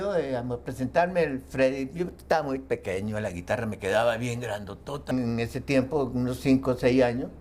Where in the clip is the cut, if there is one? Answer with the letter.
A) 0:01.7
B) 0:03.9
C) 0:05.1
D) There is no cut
C